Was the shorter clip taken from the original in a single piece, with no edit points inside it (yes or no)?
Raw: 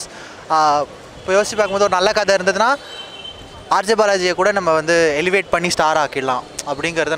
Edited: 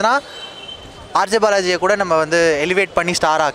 yes